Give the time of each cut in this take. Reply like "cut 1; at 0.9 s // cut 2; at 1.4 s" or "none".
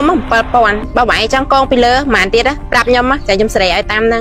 none